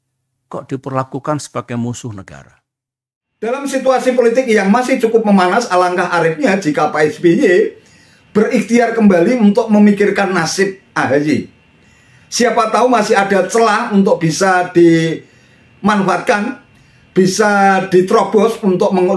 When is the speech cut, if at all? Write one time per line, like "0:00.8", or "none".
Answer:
0:03.5